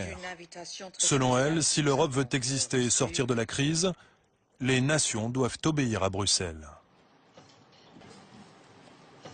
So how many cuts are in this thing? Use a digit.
1